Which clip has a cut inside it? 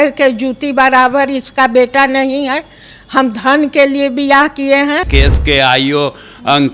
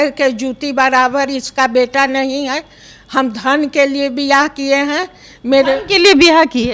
first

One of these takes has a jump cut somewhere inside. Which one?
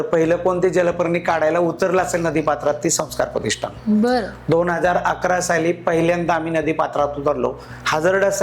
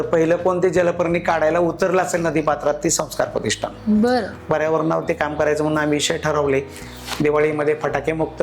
second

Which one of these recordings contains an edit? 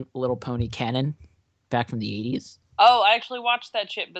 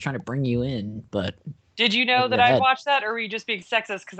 first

